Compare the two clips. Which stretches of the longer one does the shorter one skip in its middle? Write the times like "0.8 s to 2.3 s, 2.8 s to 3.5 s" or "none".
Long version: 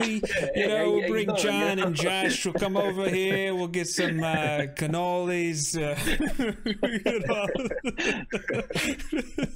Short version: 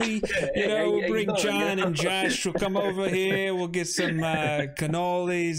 none